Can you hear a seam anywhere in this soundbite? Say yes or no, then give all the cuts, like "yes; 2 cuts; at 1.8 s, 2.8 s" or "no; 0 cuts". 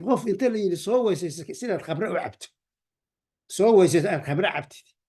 no; 0 cuts